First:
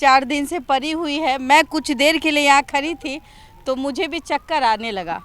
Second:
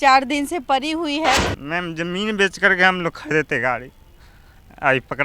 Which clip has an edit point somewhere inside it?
second; 1 cut; at 1.4 s

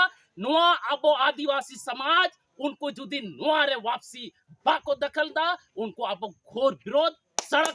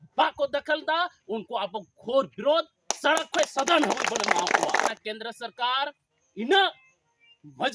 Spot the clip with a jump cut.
second; 1 cut; at 4.9 s

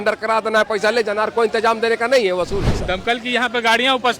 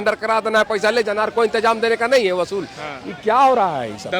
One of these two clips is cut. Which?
first; 1 cut; at 2.7 s

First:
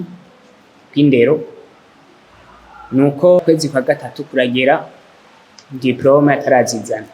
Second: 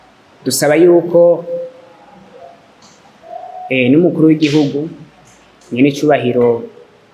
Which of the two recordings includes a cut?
first; 1 cut; at 3.4 s

